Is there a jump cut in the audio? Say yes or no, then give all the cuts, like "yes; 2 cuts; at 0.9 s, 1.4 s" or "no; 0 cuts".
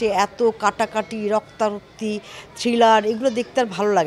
no; 0 cuts